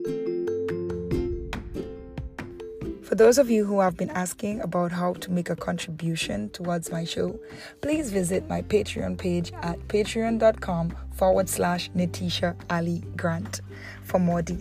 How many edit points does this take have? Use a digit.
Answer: 1